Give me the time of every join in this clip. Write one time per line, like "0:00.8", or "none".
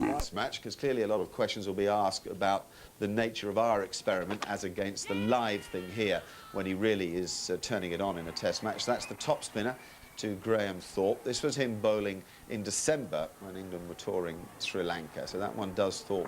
0:11.2